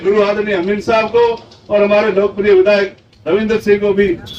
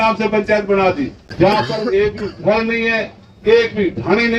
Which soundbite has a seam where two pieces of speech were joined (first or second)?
second